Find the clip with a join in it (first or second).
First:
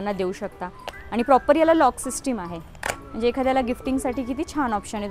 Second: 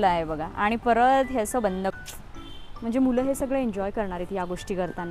second